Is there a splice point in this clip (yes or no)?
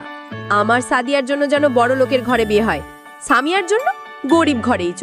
no